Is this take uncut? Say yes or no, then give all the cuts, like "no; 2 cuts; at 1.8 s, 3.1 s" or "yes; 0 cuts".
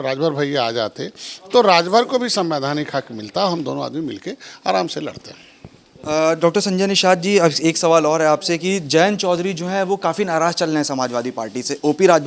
yes; 0 cuts